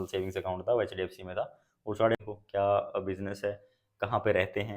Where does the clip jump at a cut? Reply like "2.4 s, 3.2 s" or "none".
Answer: 2.1 s